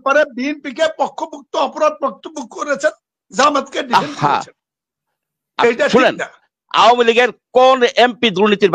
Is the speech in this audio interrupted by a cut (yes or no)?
yes